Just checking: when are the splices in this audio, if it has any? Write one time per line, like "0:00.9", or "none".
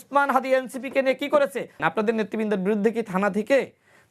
0:01.8